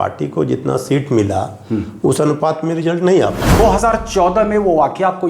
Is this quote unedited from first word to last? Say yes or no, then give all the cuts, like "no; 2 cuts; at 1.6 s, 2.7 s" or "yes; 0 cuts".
no; 1 cut; at 3.6 s